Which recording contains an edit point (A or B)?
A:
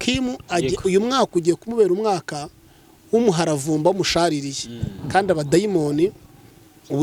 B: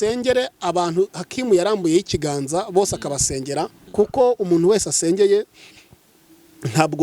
B